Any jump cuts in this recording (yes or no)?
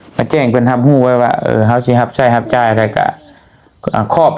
no